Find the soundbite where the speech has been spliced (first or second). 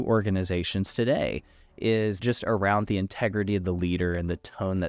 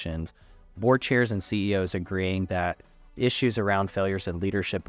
first